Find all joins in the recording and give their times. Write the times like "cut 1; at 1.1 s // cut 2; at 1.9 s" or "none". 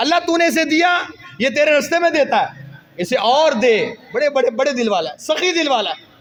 none